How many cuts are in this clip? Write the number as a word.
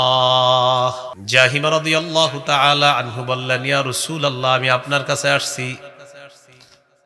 one